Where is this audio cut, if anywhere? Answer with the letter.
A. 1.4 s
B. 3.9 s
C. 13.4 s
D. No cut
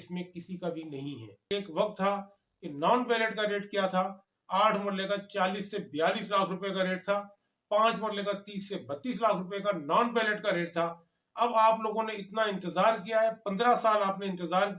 A